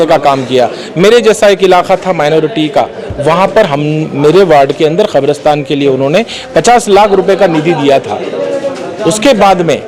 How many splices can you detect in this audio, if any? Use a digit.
0